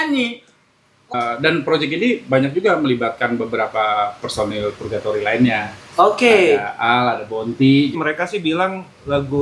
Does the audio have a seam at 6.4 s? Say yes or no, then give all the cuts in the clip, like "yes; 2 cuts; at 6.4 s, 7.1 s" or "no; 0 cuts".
no; 2 cuts; at 1.1 s, 8.0 s